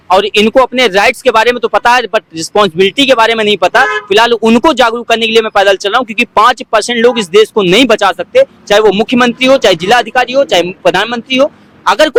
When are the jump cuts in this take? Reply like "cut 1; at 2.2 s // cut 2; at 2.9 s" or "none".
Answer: none